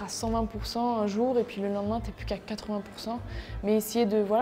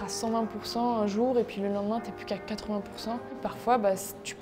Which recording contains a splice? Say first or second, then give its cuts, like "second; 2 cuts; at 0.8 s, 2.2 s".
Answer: second; 1 cut; at 3.5 s